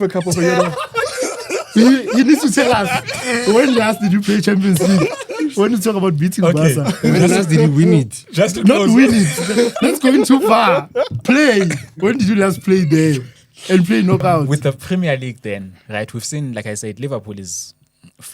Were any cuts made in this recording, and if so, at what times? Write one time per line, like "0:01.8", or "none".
0:14.5

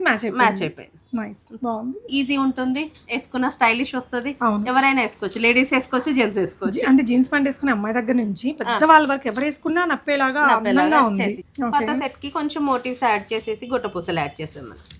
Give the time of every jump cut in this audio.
0:02.0
0:11.5

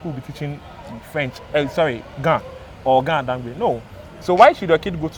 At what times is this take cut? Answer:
none

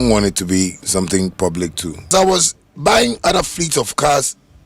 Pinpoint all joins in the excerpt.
0:02.1

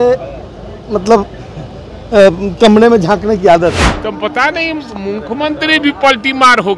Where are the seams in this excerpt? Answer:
0:03.8

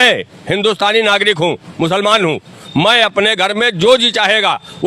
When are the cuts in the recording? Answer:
none

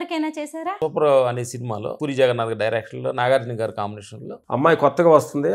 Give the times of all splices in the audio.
0:00.8
0:01.9

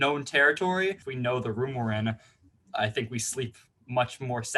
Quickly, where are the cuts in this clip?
0:01.1

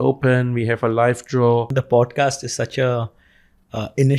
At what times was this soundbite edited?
0:01.7

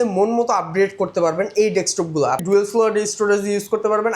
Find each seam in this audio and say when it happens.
0:02.4

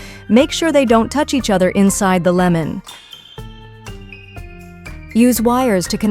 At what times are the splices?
0:02.8
0:04.4

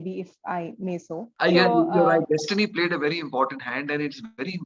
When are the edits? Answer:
0:01.2

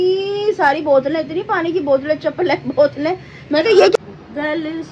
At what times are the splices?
0:04.0

